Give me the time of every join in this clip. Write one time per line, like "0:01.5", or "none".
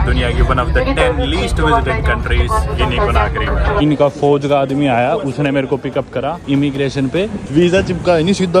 0:03.8
0:06.4
0:07.4